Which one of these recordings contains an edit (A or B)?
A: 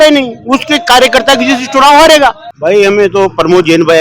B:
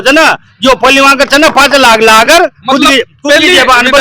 A